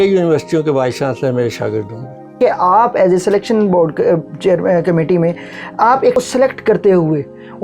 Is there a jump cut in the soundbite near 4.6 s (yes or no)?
no